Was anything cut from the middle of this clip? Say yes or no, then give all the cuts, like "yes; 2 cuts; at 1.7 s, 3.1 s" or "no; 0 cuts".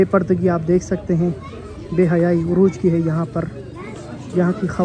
no; 0 cuts